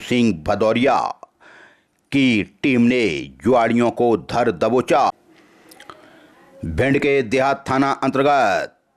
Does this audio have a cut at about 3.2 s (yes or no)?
no